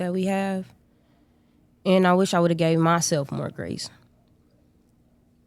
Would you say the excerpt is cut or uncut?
uncut